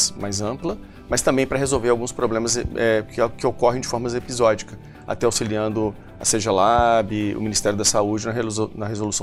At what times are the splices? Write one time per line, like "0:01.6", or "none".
none